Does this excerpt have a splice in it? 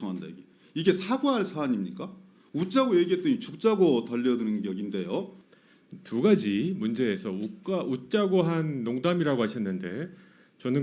yes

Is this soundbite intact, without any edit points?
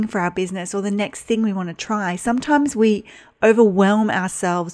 yes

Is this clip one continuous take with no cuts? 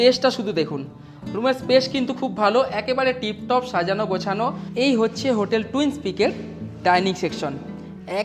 no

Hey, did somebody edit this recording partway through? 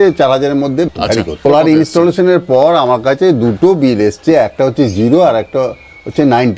yes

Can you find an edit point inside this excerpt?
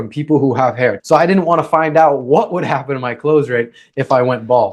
yes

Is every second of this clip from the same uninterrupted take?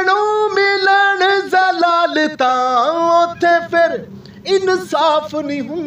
yes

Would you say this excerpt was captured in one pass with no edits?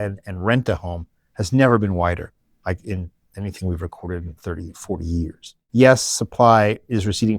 no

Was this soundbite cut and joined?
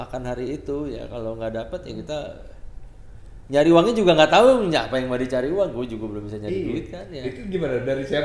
no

